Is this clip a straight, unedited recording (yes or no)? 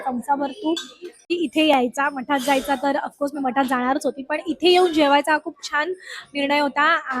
no